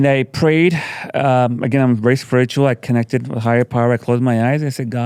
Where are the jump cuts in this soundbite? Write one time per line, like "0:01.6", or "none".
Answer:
none